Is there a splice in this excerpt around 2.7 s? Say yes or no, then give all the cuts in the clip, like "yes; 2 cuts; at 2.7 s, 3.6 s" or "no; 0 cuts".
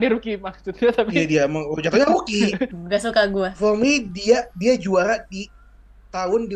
yes; 1 cut; at 2.7 s